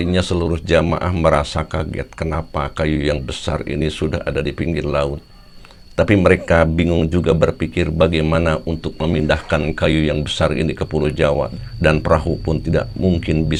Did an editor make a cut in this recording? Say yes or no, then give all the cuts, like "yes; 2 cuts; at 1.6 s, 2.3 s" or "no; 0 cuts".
no; 0 cuts